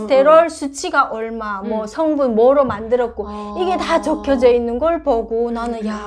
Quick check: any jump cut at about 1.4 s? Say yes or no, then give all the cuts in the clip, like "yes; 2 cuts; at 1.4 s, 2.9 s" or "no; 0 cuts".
no; 0 cuts